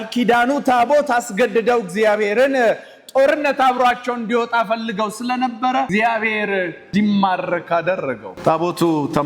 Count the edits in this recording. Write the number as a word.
three